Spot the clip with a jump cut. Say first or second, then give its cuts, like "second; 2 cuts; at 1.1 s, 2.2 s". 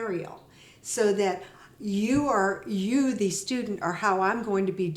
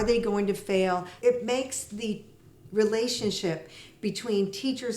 second; 1 cut; at 1.1 s